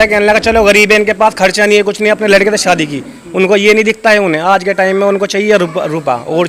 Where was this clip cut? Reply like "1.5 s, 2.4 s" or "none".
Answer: none